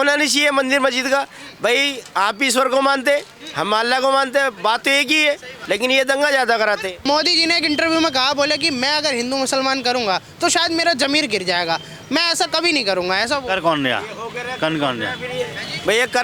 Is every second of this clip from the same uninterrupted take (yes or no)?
no